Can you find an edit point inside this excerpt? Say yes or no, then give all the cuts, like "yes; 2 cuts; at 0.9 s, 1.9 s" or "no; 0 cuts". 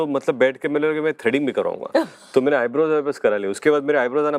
no; 0 cuts